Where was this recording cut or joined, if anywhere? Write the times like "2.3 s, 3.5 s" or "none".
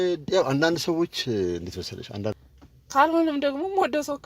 2.4 s

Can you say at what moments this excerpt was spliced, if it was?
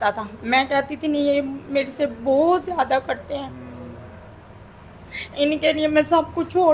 none

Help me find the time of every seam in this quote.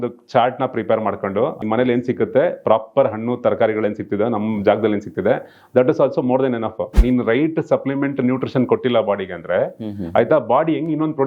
1.6 s, 7.0 s

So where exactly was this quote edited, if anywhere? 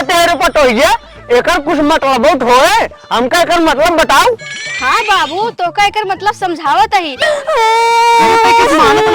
7.4 s

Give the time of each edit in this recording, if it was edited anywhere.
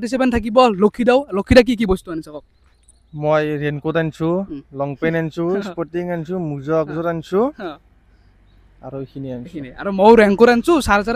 none

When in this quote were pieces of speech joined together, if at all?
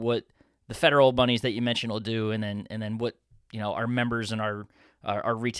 none

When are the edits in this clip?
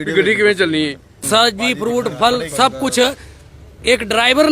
1.1 s

